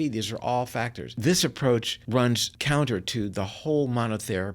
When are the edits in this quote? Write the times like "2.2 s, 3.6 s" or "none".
1.1 s, 2.3 s